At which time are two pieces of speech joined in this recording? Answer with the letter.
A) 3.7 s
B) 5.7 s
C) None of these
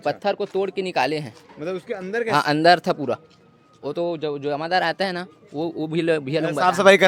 C